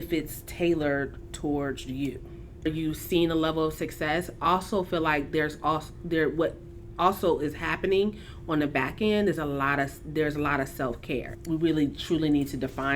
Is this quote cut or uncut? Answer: cut